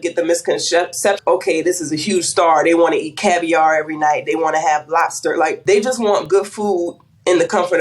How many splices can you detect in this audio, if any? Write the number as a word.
two